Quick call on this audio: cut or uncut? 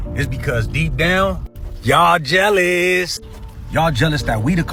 uncut